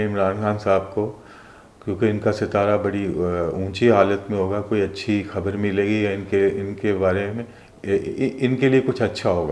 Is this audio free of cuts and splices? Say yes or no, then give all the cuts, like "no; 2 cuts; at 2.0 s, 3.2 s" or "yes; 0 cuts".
yes; 0 cuts